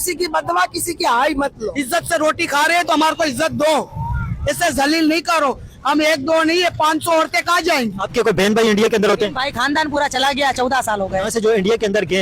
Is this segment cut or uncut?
cut